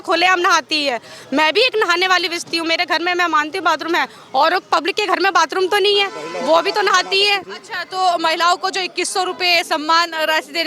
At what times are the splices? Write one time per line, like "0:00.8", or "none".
none